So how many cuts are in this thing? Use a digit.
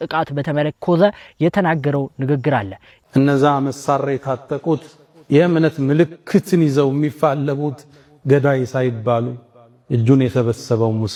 0